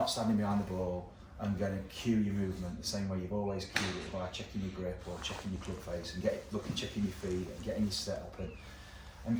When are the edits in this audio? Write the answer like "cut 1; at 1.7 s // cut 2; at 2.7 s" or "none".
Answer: none